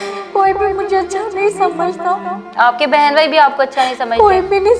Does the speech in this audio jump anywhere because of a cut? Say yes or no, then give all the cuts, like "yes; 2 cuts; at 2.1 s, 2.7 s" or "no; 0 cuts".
no; 0 cuts